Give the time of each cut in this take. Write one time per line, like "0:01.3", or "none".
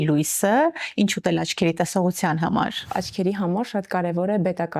0:02.9